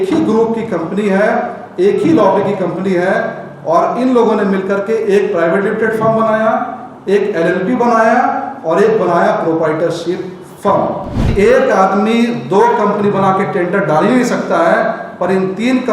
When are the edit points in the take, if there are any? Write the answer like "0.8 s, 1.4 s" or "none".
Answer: 11.3 s